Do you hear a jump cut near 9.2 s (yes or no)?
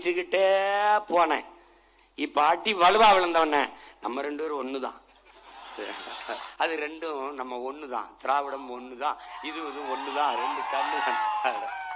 no